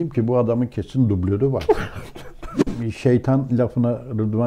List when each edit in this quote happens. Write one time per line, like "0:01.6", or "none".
0:02.6

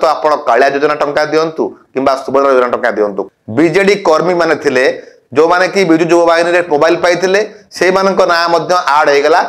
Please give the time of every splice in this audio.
0:03.2

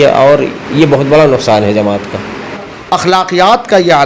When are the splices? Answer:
0:02.5

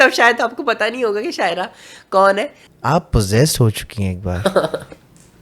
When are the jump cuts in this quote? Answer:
0:02.6

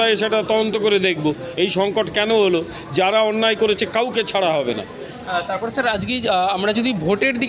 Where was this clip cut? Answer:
none

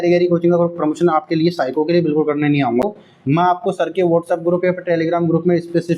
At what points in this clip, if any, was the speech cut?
0:02.8

